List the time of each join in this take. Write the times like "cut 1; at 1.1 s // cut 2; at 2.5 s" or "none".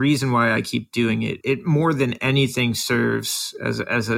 cut 1; at 1.4 s